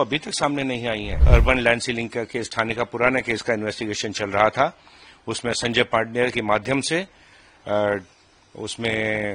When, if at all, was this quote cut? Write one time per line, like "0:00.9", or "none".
0:01.2